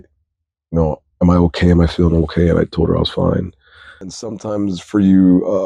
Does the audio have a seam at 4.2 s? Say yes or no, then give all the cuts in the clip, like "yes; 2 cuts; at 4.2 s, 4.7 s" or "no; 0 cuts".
yes; 1 cut; at 4.2 s